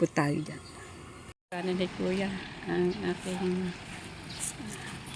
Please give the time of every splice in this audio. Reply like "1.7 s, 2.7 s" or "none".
1.4 s